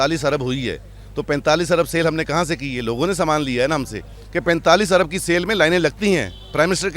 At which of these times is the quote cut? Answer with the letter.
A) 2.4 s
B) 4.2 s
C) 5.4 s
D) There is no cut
B